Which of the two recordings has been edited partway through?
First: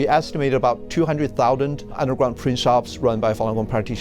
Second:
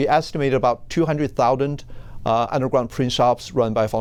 first; 1 cut; at 2.0 s

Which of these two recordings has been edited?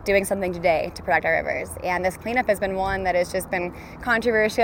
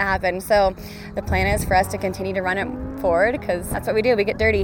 second; 2 cuts; at 1.1 s, 3.7 s

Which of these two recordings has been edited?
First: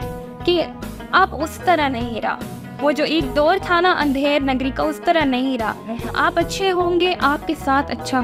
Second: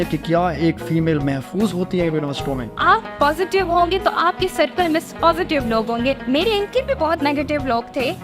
second; 2 cuts; at 2.7 s, 6.2 s

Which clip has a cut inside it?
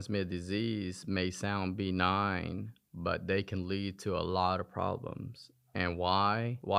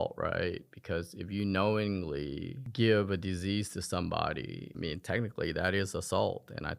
second; 2 cuts; at 2.6 s, 4.6 s

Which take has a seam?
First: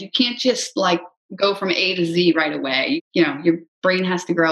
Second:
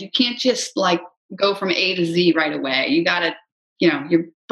first; 1 cut; at 3.0 s

